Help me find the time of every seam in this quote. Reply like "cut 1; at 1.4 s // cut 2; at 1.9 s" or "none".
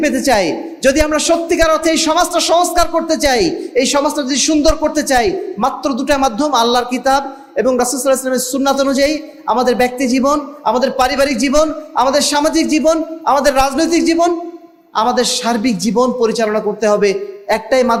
none

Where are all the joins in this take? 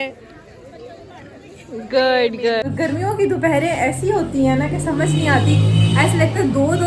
cut 1; at 2.7 s

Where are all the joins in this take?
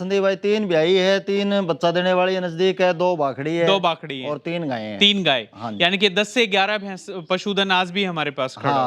none

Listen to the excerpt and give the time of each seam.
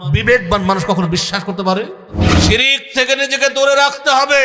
cut 1; at 2.3 s

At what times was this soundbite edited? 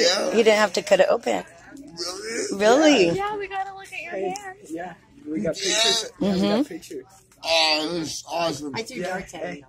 none

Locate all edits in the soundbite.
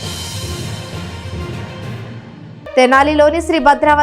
cut 1; at 2.8 s

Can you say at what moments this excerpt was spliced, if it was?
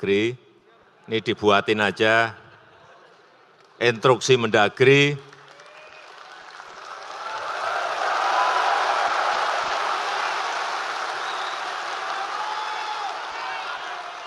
none

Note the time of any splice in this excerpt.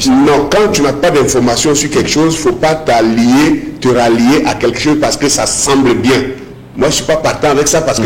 none

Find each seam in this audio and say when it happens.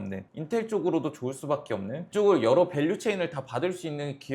cut 1; at 2.0 s

